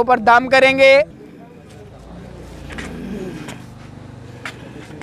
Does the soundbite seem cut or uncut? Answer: cut